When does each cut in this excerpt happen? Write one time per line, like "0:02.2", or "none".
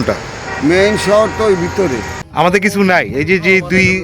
0:02.1

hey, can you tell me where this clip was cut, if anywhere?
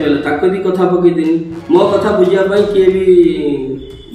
none

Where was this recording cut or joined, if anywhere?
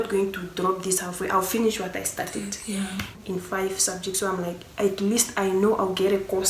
0:03.2

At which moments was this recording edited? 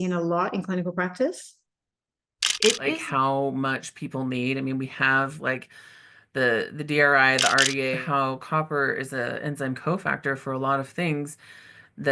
0:03.0
0:08.0

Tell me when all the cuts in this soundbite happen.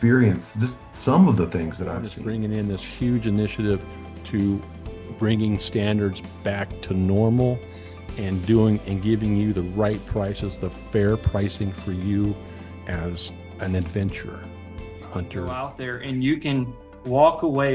0:02.2
0:15.7

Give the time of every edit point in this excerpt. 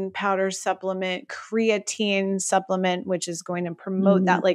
none

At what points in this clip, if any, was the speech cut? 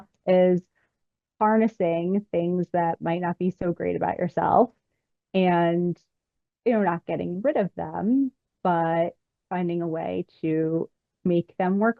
none

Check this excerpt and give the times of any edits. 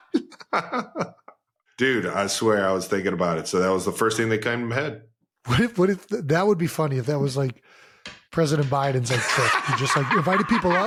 none

